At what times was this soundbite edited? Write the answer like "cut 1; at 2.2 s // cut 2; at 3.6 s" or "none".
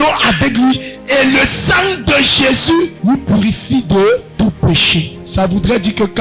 cut 1; at 2.9 s // cut 2; at 4.3 s // cut 3; at 5.2 s